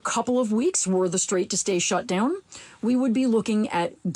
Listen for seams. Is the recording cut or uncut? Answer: uncut